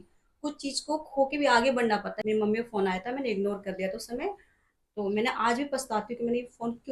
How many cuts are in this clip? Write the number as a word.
one